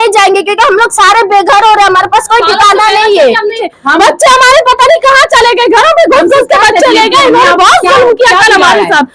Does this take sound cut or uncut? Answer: cut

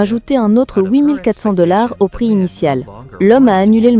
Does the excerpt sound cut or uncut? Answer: cut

